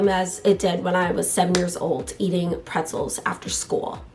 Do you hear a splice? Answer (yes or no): no